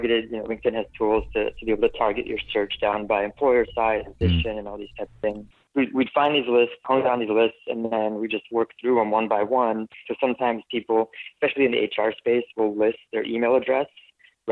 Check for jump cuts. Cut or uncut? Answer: cut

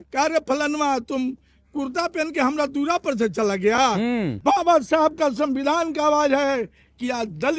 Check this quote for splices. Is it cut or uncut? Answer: cut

